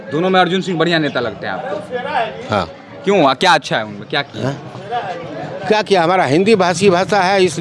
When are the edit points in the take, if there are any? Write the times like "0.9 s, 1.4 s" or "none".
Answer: none